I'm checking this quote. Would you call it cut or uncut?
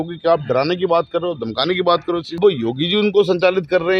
cut